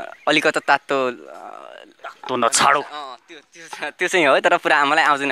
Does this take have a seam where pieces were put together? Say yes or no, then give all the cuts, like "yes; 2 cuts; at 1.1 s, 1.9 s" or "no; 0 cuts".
no; 0 cuts